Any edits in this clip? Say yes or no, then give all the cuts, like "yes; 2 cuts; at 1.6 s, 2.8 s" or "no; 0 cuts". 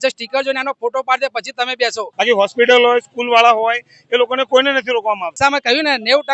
yes; 2 cuts; at 2.0 s, 5.3 s